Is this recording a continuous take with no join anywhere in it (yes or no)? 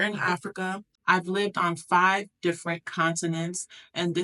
no